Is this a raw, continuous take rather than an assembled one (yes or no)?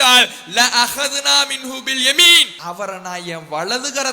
no